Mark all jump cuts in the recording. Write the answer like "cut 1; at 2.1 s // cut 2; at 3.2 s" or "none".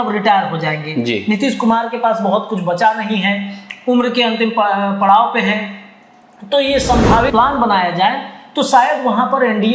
cut 1; at 7.3 s